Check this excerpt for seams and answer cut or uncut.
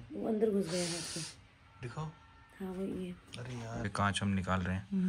cut